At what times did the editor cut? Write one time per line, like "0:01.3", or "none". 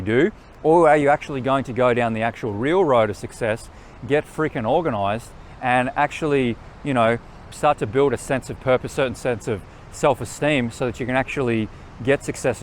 0:07.4
0:08.9